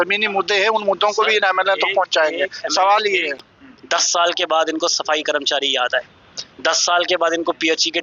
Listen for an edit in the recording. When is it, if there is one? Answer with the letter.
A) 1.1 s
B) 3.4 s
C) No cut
B